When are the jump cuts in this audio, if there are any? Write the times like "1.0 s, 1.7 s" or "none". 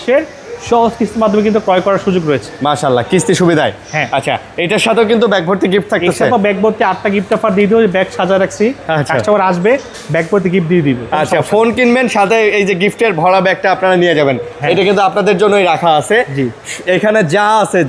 none